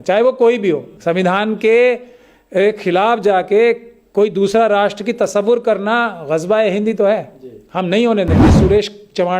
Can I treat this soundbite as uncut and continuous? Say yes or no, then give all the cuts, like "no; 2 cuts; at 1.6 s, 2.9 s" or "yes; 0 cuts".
no; 2 cuts; at 0.9 s, 8.5 s